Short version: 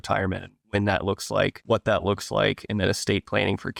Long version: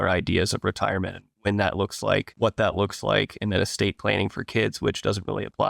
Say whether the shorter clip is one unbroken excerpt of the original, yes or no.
yes